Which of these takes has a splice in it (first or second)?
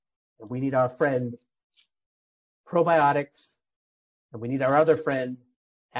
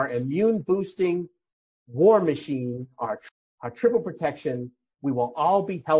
second